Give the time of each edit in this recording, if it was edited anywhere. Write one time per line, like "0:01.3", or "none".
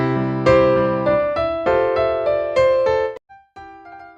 0:03.0